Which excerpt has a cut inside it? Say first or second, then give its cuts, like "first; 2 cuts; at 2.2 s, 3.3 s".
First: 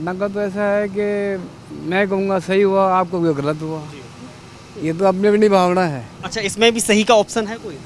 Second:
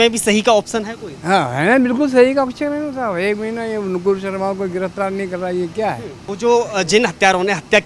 second; 1 cut; at 6.2 s